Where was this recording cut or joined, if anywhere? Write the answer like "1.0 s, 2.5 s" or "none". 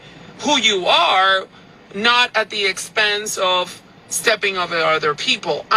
none